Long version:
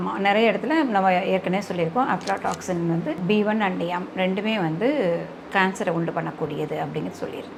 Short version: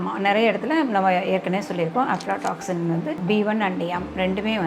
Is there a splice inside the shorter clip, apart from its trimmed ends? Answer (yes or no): no